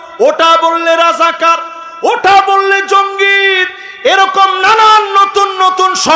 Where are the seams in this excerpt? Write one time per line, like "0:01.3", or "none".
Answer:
none

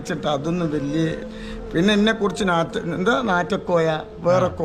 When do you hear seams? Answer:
0:01.2

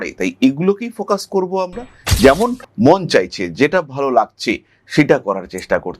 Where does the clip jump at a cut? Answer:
0:02.0

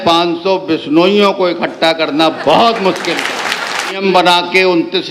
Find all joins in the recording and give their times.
0:04.0

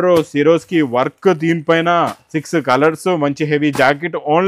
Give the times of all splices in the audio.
none

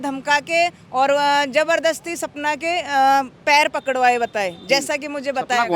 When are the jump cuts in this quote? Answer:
none

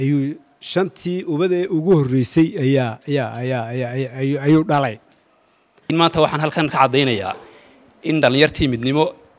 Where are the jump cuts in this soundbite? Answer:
0:05.8

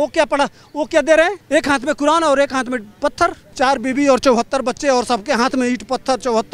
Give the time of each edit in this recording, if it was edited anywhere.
0:01.4
0:03.5

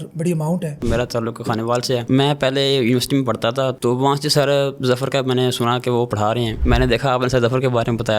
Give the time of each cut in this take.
0:00.8
0:02.0
0:03.7
0:06.6

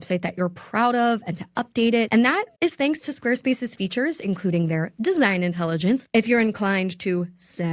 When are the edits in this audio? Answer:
0:06.0

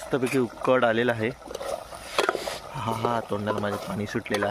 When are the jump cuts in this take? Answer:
none

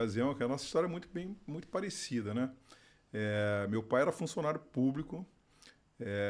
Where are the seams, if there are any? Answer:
none

